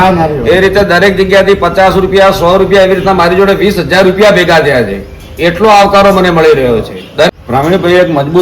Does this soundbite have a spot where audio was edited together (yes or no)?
yes